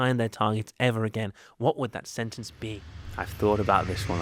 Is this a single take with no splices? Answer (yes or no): no